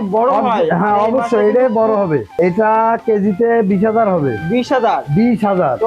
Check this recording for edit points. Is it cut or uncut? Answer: cut